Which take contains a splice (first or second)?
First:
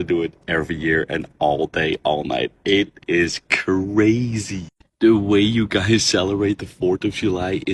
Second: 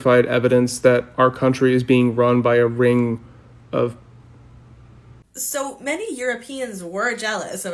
second